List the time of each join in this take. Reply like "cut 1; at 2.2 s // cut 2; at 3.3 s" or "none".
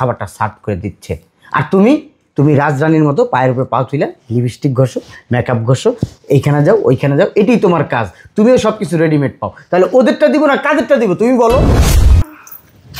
cut 1; at 12.0 s